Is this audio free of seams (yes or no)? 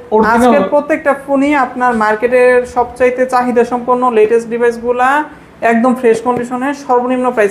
yes